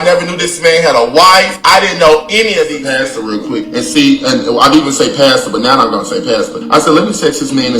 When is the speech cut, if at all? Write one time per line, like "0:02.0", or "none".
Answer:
0:02.8